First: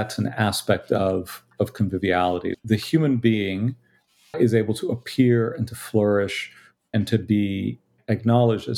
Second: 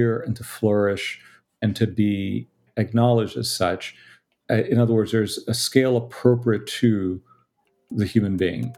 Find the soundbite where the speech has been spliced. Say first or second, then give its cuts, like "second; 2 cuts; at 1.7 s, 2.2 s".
first; 2 cuts; at 2.5 s, 4.3 s